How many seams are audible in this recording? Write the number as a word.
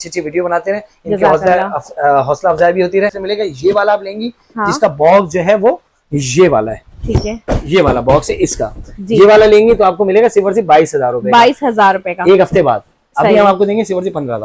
one